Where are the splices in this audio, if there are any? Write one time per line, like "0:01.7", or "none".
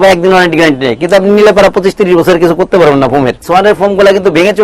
0:03.4